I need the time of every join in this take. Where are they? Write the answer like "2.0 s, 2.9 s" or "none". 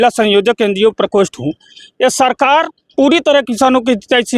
none